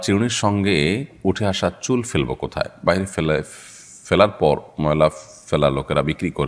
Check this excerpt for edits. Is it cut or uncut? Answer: uncut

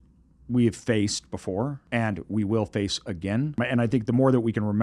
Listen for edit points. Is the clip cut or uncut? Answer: cut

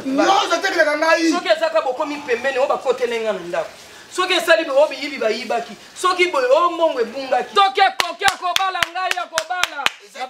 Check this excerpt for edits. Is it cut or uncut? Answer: cut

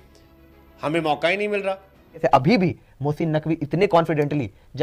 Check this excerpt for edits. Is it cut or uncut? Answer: cut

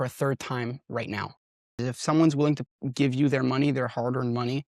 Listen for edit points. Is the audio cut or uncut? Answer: cut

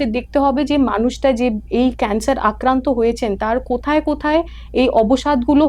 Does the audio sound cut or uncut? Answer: uncut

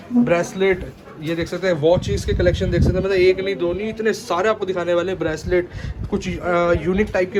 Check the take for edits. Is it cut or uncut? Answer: uncut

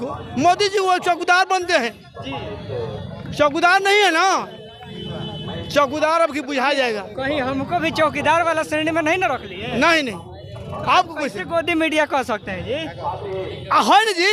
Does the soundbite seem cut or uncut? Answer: uncut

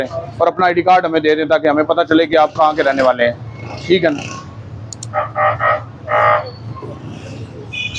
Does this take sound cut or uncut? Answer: uncut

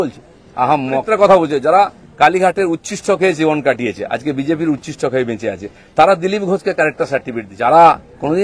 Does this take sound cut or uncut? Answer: cut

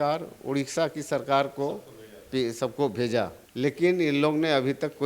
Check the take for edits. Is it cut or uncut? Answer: cut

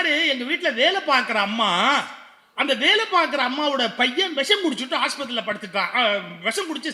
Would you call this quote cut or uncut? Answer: uncut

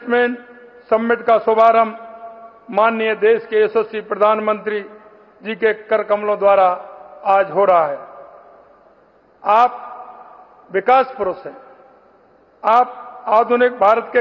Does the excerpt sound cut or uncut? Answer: uncut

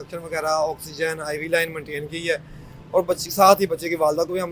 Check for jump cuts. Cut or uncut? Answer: uncut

